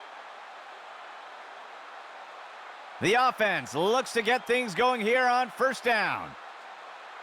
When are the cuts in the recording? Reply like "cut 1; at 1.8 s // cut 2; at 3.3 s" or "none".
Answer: cut 1; at 1.3 s // cut 2; at 3.0 s // cut 3; at 6.3 s